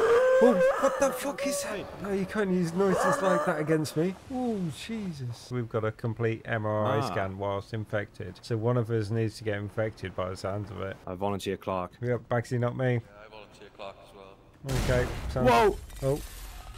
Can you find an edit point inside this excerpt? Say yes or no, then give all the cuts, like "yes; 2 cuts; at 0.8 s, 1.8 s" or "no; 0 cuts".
yes; 2 cuts; at 3.4 s, 5.4 s